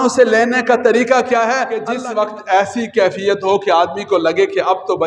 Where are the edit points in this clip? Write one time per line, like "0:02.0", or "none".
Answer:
0:01.9